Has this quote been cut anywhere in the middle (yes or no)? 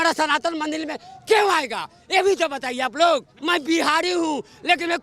yes